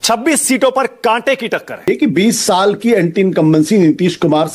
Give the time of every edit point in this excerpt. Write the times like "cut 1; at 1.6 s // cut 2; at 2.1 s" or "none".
cut 1; at 1.9 s

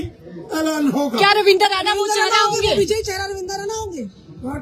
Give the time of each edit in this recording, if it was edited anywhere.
none

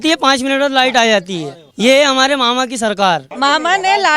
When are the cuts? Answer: cut 1; at 1.6 s // cut 2; at 3.3 s

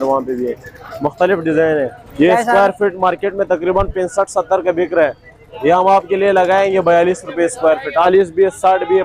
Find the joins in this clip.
cut 1; at 2.0 s // cut 2; at 8.1 s

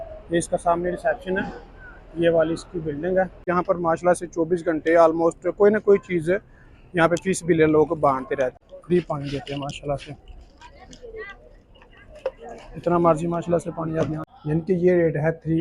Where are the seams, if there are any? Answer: cut 1; at 3.4 s // cut 2; at 8.7 s // cut 3; at 14.3 s

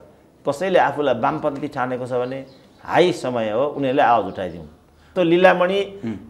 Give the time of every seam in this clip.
cut 1; at 5.1 s

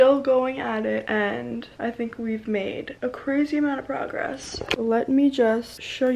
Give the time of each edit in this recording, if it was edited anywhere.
none

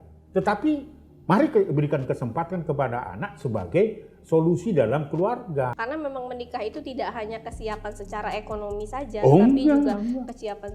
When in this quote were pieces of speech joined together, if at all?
cut 1; at 5.8 s

